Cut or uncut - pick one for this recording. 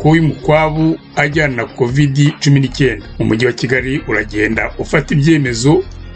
cut